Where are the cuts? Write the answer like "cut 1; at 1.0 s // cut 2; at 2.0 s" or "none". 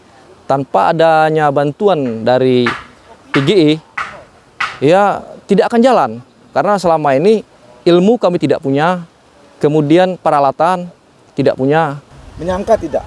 cut 1; at 12.0 s